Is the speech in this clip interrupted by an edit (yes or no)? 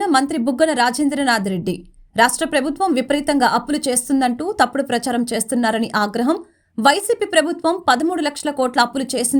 no